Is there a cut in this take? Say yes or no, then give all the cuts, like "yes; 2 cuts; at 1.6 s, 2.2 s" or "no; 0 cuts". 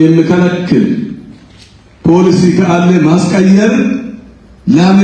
no; 0 cuts